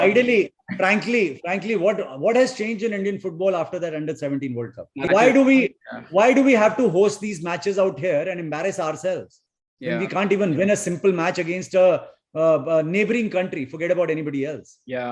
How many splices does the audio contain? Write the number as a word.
one